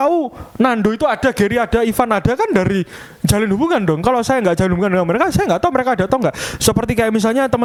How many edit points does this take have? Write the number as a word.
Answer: zero